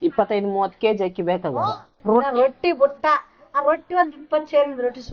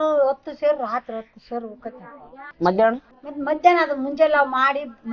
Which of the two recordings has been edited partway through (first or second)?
first